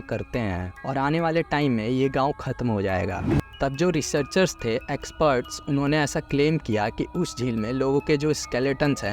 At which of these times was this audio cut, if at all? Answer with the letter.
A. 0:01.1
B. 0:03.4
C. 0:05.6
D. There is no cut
B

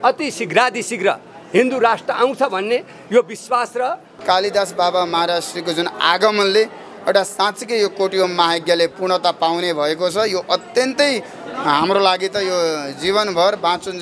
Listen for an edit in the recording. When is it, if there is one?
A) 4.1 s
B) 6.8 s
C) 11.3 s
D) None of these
A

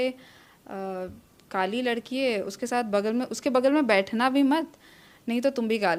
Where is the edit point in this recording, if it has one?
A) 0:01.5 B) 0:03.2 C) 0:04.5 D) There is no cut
D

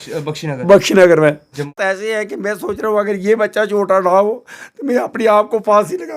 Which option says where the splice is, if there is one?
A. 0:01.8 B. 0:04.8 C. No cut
A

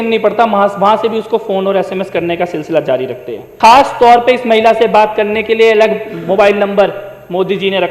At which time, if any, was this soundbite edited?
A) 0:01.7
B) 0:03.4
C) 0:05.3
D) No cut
B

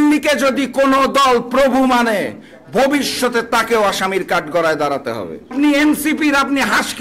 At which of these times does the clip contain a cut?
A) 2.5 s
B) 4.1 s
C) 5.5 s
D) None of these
C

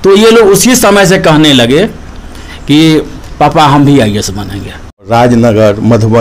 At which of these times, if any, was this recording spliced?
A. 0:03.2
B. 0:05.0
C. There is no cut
B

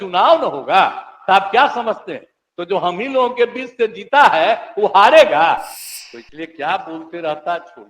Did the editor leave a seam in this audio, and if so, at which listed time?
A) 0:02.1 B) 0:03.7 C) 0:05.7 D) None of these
C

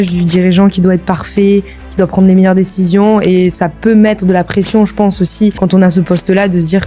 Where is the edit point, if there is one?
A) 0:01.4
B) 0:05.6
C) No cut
B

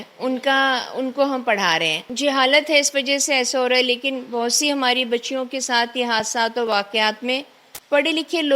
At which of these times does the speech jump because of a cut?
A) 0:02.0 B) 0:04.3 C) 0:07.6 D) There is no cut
A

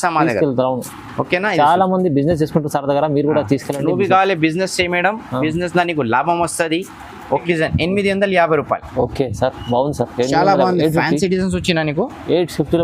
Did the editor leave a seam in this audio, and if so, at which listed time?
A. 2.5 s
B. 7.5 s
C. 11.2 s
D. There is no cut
B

